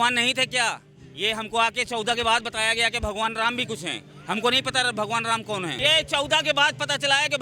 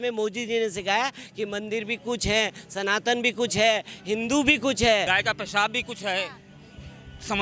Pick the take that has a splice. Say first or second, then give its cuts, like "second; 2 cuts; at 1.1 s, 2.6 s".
second; 1 cut; at 5.1 s